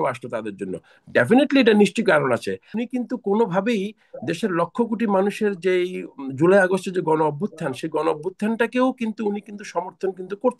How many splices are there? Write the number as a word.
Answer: one